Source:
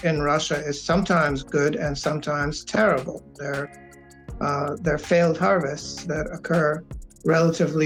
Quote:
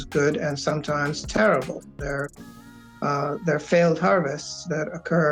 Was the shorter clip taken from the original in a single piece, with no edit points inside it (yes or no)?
yes